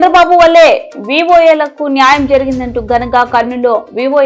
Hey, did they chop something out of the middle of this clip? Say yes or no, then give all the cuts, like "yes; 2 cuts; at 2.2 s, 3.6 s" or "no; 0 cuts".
no; 0 cuts